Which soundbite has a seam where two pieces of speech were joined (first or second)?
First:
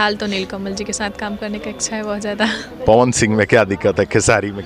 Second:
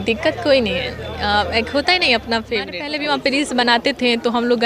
second